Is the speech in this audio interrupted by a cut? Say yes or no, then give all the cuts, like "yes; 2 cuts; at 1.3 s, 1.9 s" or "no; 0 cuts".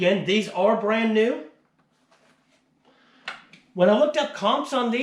no; 0 cuts